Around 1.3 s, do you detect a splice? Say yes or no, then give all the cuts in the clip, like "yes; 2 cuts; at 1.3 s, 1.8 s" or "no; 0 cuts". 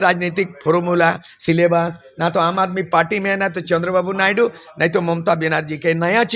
no; 0 cuts